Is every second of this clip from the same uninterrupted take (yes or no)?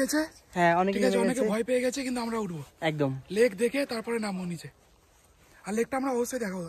yes